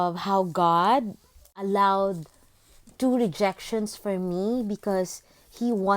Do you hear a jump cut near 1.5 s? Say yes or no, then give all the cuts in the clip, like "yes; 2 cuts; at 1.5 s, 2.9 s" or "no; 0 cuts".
yes; 1 cut; at 1.5 s